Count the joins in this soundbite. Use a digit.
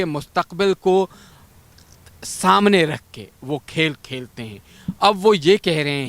0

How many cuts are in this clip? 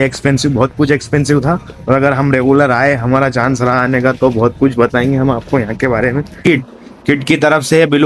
1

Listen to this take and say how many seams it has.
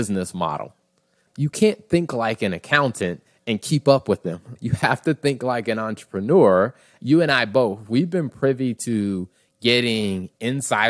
3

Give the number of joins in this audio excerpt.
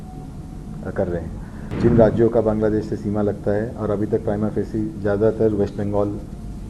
1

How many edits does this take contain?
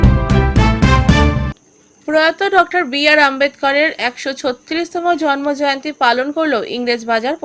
1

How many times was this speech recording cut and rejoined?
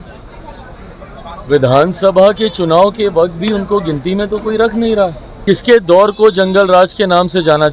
1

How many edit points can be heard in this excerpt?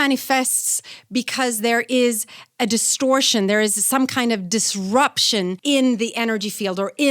1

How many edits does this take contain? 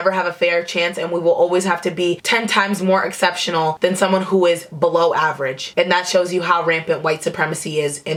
0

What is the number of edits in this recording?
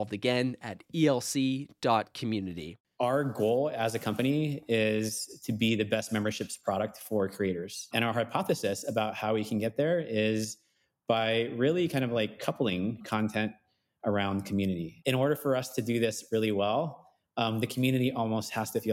2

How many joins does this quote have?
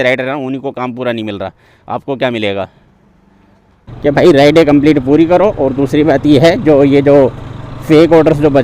1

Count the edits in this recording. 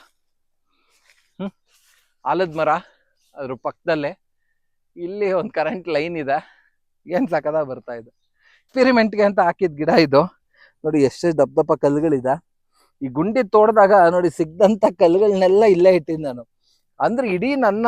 1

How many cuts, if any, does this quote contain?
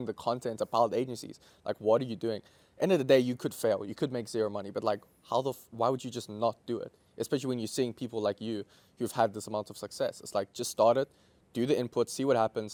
0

